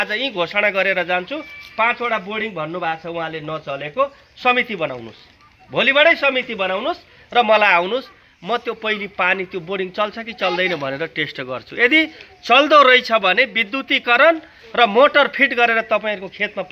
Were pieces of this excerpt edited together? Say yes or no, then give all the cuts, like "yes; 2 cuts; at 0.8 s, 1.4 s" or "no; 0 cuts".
no; 0 cuts